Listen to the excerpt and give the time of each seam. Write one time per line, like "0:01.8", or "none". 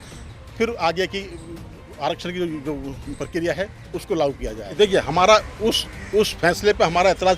0:04.8